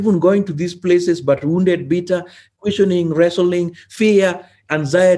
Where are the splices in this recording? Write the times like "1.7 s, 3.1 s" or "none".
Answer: none